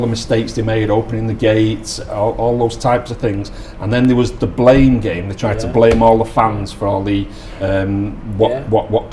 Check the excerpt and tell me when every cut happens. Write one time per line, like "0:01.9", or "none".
none